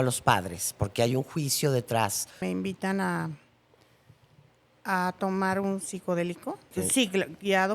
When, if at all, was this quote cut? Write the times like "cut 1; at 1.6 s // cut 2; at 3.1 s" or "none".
cut 1; at 2.4 s // cut 2; at 6.7 s